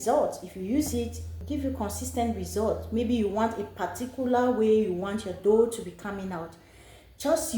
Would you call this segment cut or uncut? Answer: cut